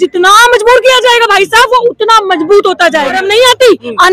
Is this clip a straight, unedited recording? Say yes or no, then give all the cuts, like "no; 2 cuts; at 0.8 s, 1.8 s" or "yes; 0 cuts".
no; 1 cut; at 3.2 s